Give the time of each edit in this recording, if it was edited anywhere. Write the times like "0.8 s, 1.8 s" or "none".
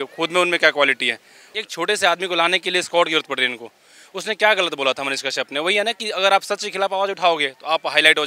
1.5 s